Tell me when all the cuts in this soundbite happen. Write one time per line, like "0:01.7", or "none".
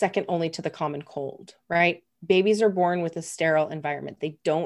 none